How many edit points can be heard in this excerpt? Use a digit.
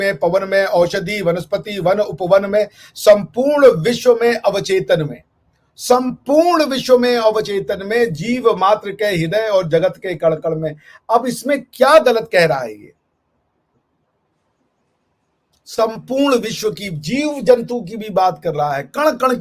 0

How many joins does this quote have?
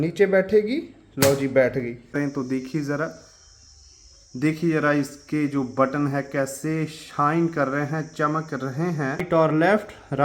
2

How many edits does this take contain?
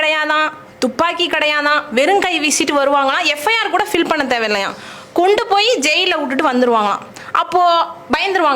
0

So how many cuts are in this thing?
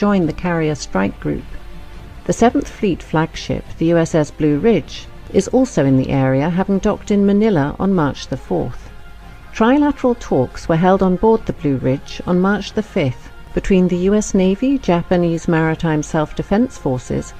0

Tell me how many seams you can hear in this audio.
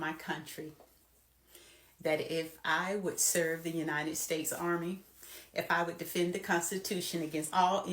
0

